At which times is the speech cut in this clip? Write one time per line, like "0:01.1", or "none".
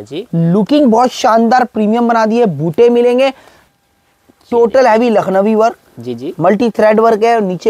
0:03.6